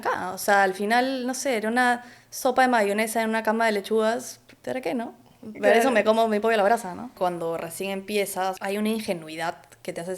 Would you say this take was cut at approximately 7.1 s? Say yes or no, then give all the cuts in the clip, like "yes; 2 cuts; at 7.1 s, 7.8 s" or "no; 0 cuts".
yes; 2 cuts; at 7.1 s, 8.6 s